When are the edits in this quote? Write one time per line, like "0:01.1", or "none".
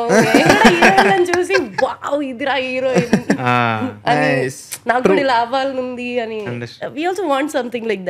none